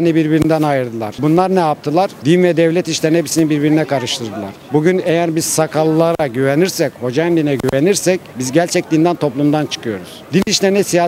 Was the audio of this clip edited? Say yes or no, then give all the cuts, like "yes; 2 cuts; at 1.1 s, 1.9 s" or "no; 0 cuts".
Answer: no; 0 cuts